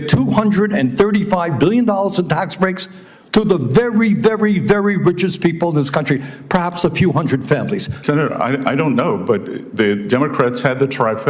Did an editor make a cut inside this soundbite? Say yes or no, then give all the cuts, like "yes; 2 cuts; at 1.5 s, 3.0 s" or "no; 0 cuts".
yes; 1 cut; at 7.9 s